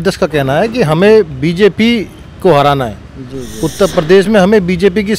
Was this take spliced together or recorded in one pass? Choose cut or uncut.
uncut